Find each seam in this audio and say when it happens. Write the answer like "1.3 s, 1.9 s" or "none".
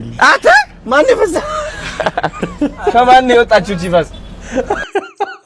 none